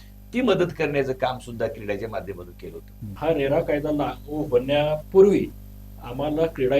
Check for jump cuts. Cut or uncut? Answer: cut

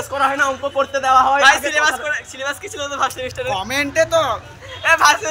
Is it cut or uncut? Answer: cut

